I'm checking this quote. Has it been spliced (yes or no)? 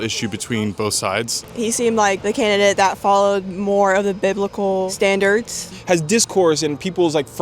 yes